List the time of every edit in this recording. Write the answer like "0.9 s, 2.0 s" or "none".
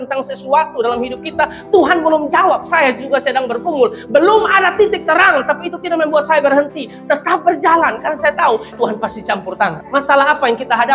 8.7 s, 9.8 s